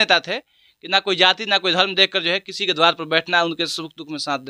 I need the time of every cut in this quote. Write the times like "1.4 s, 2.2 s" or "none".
none